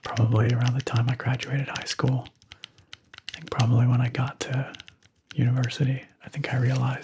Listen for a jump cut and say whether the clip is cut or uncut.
uncut